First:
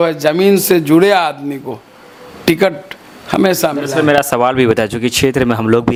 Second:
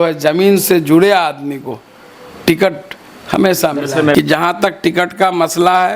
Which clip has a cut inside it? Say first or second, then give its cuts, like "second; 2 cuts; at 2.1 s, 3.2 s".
second; 1 cut; at 4.1 s